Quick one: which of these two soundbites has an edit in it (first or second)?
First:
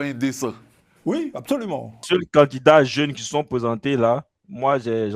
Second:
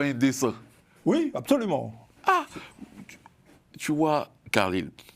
first